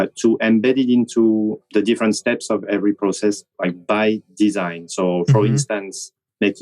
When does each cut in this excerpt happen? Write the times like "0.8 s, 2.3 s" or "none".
1.6 s